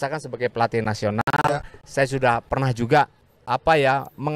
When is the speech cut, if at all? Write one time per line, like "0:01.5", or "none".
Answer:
0:03.3

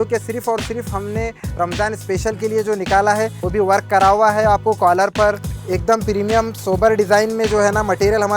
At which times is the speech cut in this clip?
0:03.4
0:05.5

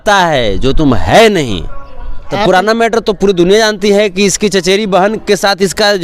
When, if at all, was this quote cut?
0:02.3

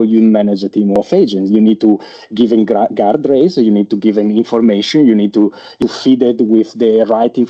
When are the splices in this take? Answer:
0:01.0
0:05.8

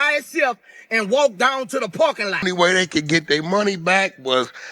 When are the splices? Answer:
0:02.5

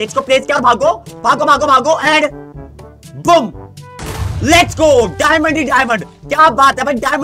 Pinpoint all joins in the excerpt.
0:06.0

